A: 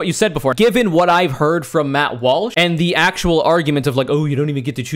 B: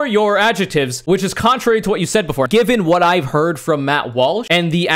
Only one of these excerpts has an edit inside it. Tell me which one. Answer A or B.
B